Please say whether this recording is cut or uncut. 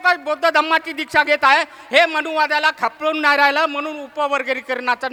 uncut